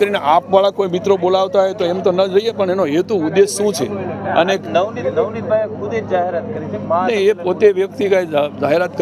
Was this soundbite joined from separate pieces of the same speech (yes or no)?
no